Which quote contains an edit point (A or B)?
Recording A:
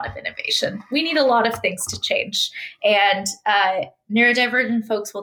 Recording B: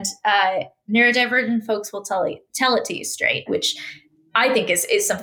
B